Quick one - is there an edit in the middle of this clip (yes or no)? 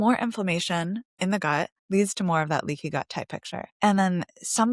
yes